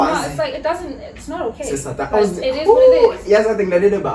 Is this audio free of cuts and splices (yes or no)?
yes